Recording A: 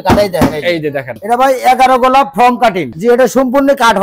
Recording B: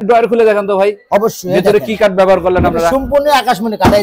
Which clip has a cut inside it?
A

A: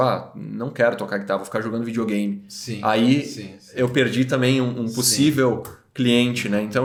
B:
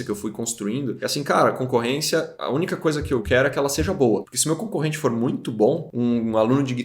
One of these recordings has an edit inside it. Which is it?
B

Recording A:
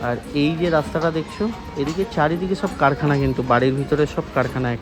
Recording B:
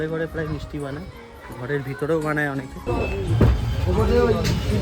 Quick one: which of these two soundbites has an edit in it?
B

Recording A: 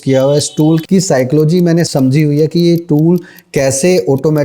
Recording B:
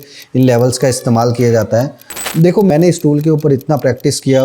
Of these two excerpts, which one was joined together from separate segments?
B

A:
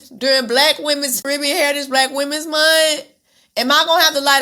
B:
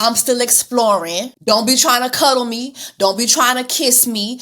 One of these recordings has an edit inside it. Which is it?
B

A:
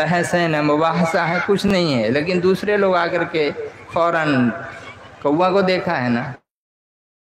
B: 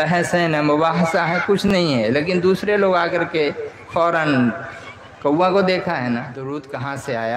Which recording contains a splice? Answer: B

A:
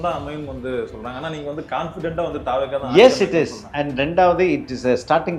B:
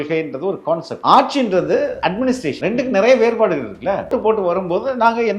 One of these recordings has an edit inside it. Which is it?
B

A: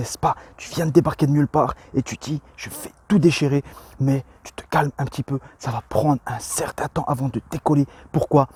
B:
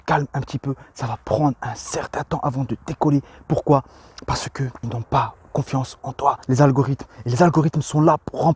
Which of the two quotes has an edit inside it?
B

